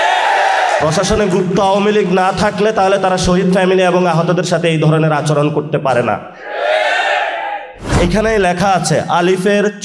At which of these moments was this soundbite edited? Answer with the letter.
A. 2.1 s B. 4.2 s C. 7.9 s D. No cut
C